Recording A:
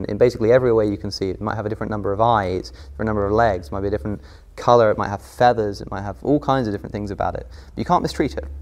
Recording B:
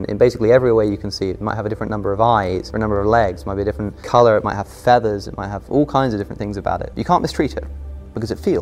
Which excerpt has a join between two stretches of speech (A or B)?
B